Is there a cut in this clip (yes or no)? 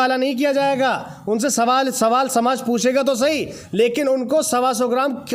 no